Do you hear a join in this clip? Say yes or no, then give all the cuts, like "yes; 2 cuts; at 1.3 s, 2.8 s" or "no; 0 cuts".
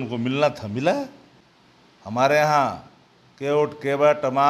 yes; 1 cut; at 1.2 s